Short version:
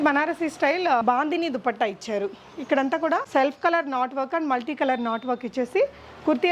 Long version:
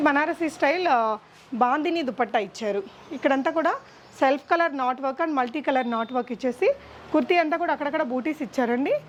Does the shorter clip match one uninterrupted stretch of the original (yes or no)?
no